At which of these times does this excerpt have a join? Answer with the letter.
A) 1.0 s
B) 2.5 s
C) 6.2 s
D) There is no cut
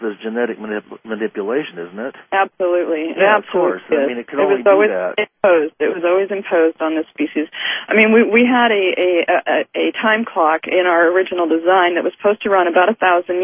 B